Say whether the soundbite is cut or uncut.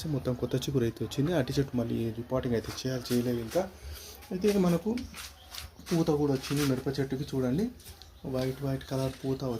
uncut